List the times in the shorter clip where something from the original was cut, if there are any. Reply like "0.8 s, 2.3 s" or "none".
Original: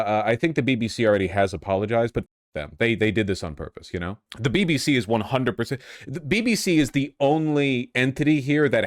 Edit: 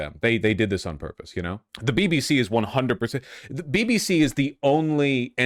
none